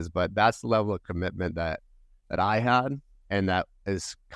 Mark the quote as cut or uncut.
uncut